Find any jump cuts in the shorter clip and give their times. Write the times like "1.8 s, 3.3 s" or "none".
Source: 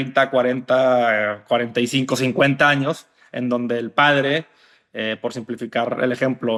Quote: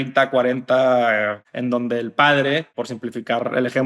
1.4 s, 2.8 s